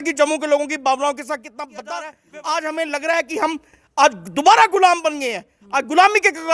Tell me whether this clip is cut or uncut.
cut